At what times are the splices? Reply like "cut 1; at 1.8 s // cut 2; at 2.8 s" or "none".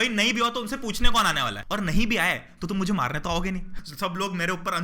cut 1; at 1.6 s // cut 2; at 3.7 s

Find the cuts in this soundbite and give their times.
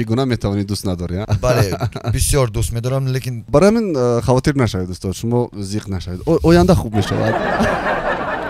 cut 1; at 3.5 s

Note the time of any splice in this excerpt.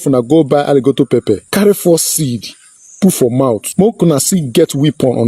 cut 1; at 1.4 s // cut 2; at 3.7 s

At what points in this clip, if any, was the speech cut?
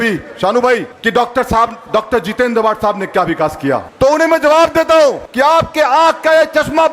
cut 1; at 0.9 s // cut 2; at 3.9 s // cut 3; at 5.2 s

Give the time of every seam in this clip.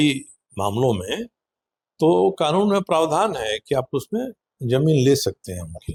none

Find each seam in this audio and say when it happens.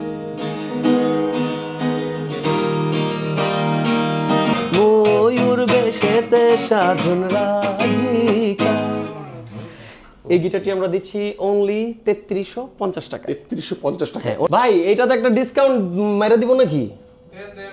cut 1; at 4.6 s // cut 2; at 14.5 s

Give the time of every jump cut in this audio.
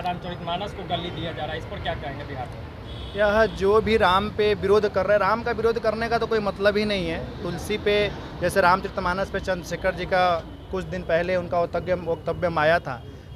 none

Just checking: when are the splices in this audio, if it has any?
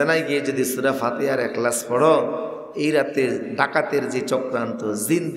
none

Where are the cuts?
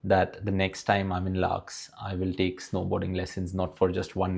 none

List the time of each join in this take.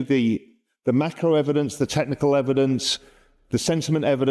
none

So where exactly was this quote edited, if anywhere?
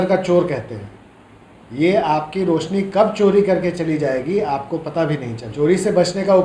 cut 1; at 5.4 s

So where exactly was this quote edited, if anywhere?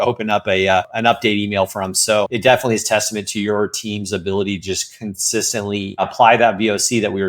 cut 1; at 0.9 s // cut 2; at 2.3 s // cut 3; at 6.1 s

